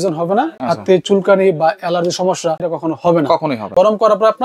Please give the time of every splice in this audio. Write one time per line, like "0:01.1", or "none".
0:02.7
0:03.6